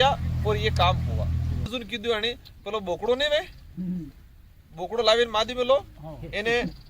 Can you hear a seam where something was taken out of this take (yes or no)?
yes